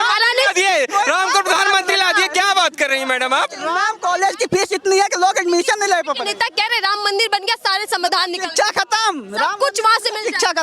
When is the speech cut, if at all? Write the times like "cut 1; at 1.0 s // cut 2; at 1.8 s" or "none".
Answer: cut 1; at 3.9 s